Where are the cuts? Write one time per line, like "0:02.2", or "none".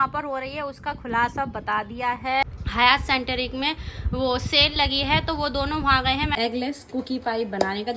0:02.4
0:06.3